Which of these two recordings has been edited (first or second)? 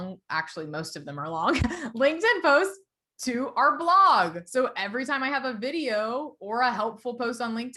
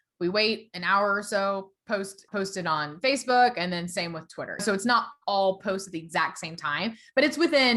second